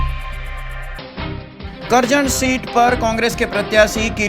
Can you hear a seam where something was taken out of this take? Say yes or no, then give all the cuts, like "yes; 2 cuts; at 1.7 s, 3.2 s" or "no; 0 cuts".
yes; 1 cut; at 0.9 s